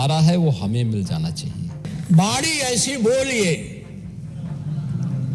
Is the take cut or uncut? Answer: cut